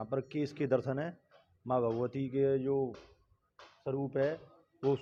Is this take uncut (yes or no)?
yes